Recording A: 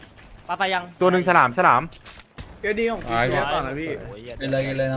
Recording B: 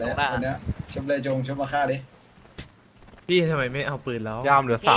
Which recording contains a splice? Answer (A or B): A